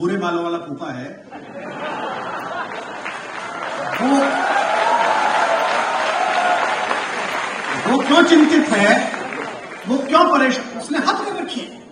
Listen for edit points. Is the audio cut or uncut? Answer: uncut